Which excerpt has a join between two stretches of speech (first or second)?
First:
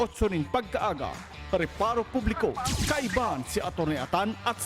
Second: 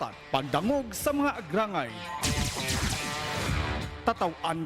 second